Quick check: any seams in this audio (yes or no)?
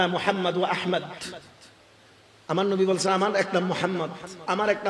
no